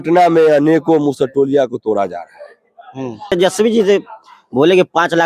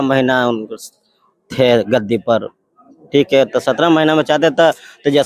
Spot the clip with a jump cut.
first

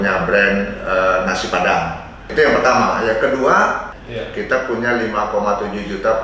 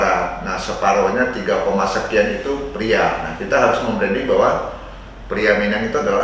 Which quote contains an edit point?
first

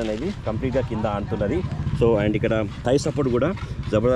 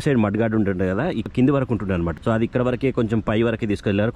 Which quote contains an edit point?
second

